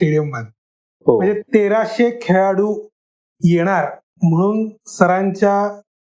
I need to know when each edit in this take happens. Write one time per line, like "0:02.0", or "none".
0:01.4